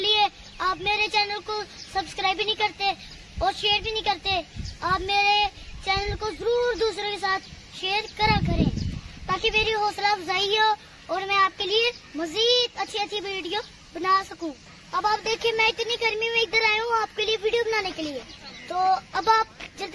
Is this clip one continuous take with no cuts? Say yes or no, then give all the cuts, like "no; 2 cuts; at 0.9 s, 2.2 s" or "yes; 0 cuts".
yes; 0 cuts